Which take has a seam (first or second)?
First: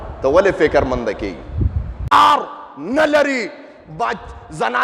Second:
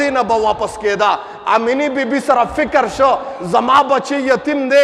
first